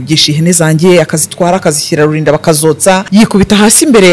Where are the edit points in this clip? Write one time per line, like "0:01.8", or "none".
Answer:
0:03.0